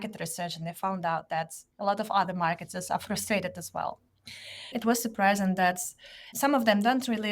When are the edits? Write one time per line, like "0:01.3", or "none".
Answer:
0:04.7
0:06.3